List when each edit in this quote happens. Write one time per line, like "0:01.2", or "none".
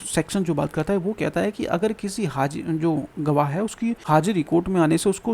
0:04.0